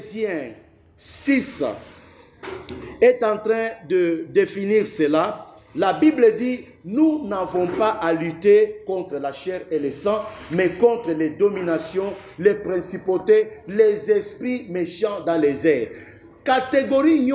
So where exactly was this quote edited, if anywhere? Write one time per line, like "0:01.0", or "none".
none